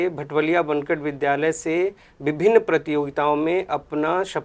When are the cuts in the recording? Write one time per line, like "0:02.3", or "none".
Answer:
none